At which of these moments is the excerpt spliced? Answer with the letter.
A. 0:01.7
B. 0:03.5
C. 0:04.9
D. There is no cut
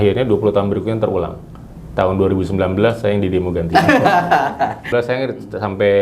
C